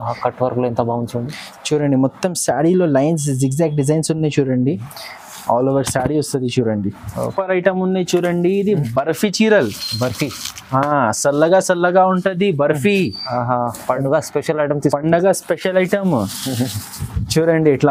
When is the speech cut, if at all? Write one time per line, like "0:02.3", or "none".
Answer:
0:07.3